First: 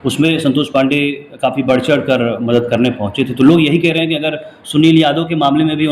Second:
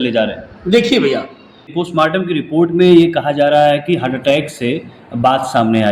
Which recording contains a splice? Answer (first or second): second